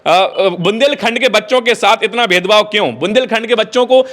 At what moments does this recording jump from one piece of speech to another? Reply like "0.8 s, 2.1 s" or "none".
none